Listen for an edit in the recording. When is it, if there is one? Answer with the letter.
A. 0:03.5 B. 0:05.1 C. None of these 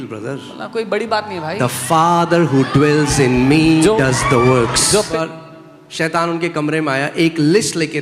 B